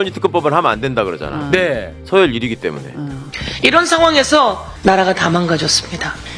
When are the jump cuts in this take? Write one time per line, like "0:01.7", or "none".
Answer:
0:03.2